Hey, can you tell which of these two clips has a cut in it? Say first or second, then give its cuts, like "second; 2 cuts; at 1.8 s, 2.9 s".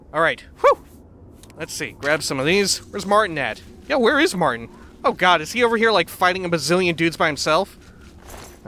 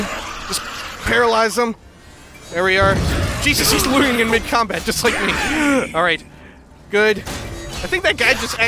second; 2 cuts; at 3.0 s, 7.5 s